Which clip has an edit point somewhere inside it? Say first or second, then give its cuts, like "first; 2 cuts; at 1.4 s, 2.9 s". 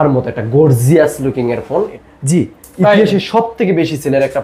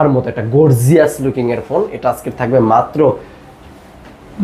first; 1 cut; at 1.9 s